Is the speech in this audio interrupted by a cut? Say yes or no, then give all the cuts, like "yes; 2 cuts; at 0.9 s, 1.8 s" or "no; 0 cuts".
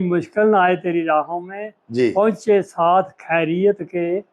no; 0 cuts